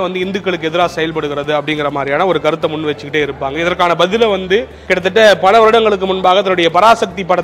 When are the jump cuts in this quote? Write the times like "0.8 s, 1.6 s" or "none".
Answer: none